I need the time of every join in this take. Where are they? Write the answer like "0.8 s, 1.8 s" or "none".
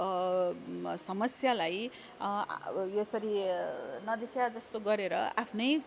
none